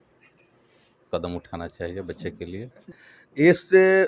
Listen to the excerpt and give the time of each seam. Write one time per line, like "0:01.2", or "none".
0:02.9